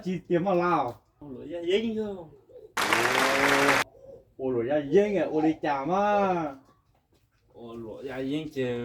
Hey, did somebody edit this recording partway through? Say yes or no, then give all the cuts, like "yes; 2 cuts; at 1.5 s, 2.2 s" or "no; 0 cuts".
yes; 1 cut; at 1.3 s